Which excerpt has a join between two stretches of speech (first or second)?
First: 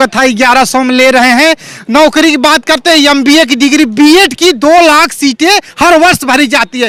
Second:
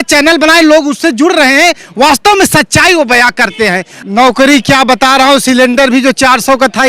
second